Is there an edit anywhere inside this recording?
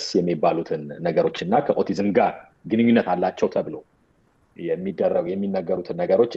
no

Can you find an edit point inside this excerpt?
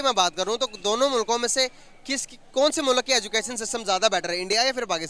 no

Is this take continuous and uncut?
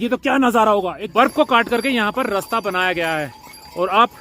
no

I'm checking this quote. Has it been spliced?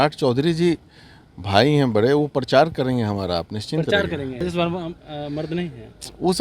yes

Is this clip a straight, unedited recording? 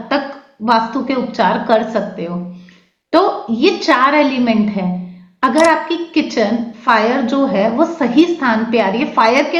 yes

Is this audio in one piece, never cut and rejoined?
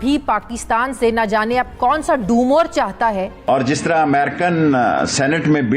no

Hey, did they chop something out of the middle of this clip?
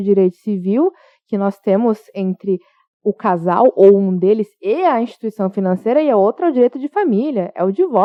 no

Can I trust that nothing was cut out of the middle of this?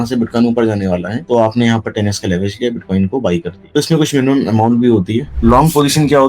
no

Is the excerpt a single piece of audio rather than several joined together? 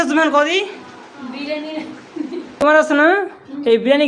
no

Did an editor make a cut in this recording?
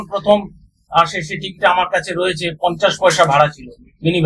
no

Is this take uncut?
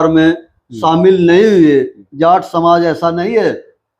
no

